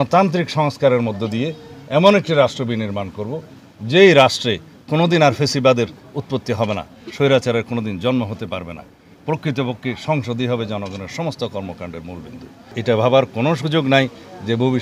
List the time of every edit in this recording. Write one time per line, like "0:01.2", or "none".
0:12.7